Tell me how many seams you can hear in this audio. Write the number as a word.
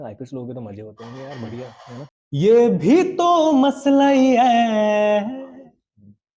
one